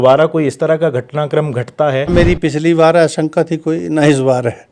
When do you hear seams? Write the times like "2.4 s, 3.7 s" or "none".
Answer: 2.1 s